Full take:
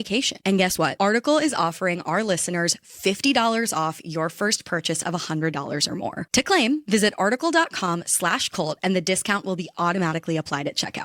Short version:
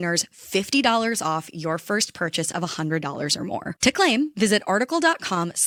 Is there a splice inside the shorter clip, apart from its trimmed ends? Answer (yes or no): no